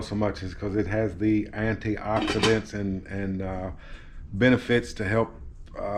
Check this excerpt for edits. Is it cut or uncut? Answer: uncut